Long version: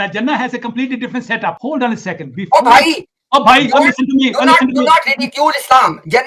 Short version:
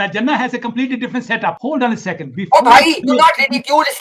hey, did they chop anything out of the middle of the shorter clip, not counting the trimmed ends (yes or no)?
yes